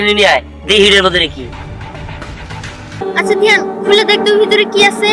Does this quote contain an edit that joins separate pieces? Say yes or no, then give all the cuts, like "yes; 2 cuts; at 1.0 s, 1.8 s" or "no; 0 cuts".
yes; 1 cut; at 3.0 s